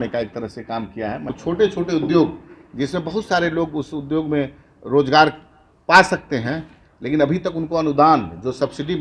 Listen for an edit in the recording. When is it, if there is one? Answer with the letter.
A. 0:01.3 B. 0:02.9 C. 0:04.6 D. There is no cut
A